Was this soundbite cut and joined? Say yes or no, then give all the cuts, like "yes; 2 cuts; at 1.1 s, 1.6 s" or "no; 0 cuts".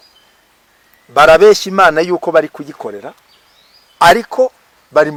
no; 0 cuts